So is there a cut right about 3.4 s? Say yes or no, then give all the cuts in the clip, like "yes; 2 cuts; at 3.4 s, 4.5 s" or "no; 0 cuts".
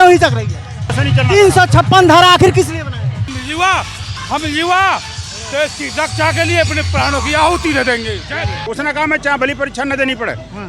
yes; 3 cuts; at 1.0 s, 3.4 s, 8.6 s